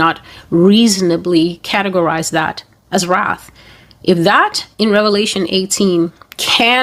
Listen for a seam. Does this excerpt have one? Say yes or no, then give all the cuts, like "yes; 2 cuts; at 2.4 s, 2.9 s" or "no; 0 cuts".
no; 0 cuts